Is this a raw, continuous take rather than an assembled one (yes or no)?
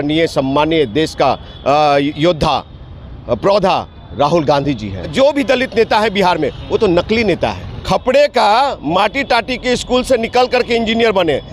no